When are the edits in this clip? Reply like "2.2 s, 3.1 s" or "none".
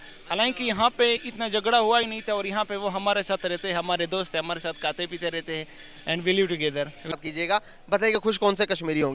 7.2 s